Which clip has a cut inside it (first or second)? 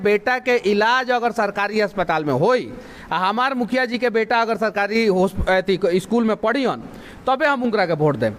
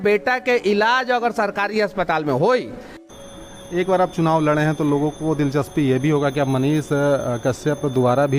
second